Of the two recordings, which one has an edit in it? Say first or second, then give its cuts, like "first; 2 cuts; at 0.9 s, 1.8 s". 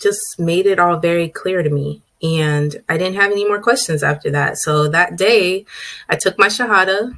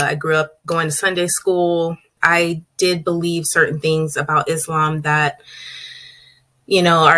second; 1 cut; at 2.2 s